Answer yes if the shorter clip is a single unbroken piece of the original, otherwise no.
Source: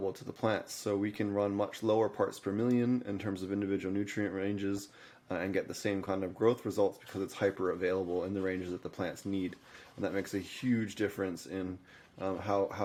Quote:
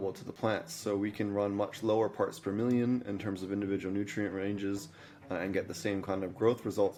yes